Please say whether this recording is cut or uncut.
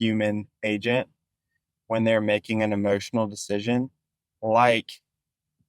uncut